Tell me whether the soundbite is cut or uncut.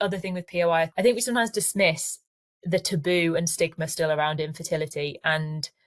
cut